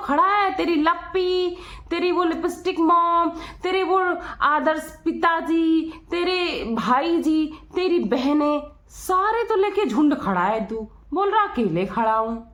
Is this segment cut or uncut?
uncut